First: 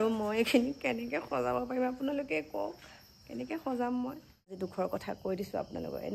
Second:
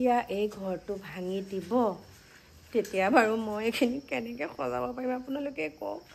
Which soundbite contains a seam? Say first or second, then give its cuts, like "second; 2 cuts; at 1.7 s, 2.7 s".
first; 1 cut; at 4.6 s